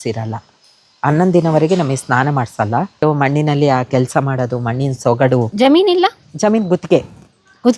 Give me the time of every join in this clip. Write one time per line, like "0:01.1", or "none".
0:03.0
0:05.5